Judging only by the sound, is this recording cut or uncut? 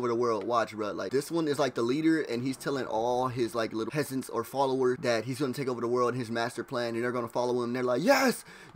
cut